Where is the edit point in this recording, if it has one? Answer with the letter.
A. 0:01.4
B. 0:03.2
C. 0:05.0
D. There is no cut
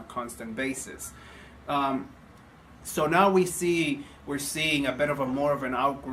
D